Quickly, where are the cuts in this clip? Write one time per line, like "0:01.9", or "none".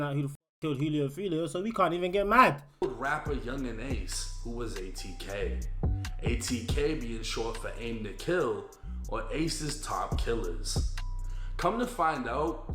0:02.8